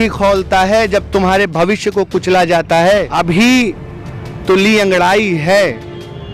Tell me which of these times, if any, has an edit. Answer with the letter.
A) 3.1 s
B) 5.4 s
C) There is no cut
A